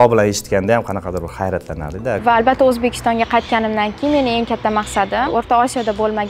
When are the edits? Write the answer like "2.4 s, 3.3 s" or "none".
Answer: 2.2 s, 5.3 s